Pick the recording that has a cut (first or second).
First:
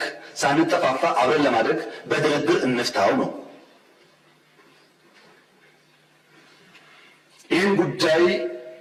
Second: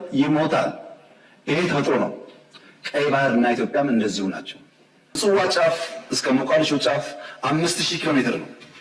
second